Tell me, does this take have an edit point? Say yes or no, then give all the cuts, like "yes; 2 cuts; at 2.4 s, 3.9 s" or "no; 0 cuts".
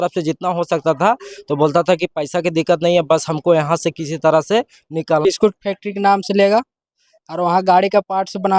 yes; 1 cut; at 5.2 s